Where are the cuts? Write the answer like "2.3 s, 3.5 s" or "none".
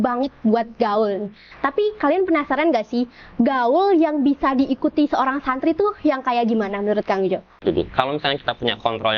7.6 s